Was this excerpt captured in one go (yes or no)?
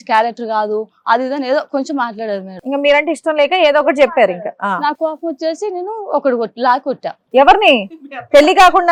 yes